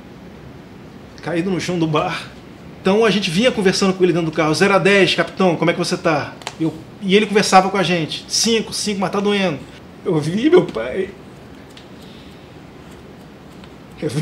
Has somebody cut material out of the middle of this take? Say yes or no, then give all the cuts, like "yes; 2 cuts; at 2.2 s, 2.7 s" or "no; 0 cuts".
yes; 2 cuts; at 2.8 s, 9.7 s